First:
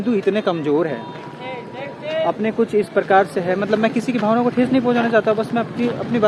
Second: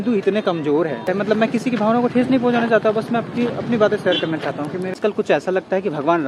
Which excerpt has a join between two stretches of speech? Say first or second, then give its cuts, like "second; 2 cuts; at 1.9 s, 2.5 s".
second; 2 cuts; at 1.0 s, 5.1 s